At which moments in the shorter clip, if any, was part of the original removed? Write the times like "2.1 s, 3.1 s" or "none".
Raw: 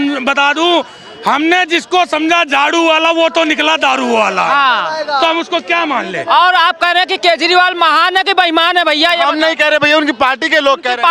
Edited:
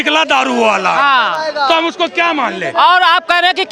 none